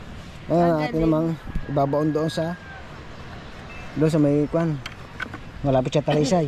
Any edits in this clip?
no; 0 cuts

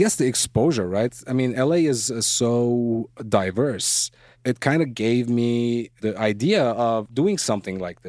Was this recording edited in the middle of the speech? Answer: yes; 4 cuts; at 1.1 s, 4.3 s, 6.0 s, 7.1 s

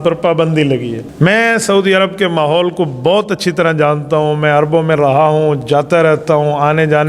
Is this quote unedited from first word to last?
no; 1 cut; at 1.0 s

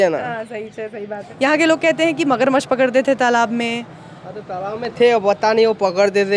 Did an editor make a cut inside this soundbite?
yes; 1 cut; at 1.2 s

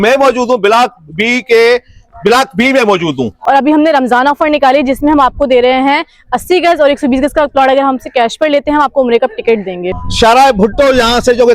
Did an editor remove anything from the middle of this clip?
yes; 2 cuts; at 3.3 s, 10.0 s

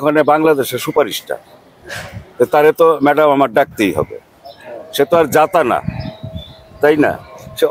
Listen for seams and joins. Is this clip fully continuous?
yes; 0 cuts

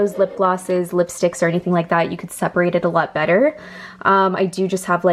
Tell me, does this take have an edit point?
no; 0 cuts

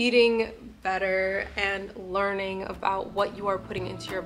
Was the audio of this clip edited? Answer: no; 0 cuts

